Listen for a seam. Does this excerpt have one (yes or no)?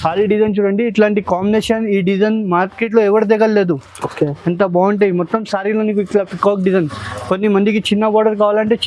no